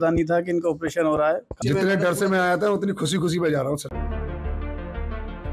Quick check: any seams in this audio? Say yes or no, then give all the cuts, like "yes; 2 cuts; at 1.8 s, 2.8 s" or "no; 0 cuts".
yes; 2 cuts; at 1.5 s, 3.8 s